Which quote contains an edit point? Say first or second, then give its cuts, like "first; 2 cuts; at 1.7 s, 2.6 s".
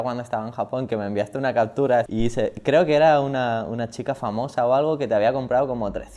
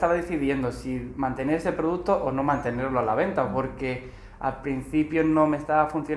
first; 1 cut; at 2.1 s